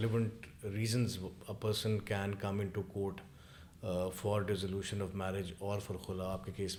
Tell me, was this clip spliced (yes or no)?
no